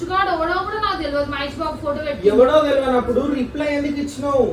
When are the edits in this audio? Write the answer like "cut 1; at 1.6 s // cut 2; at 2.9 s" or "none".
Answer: none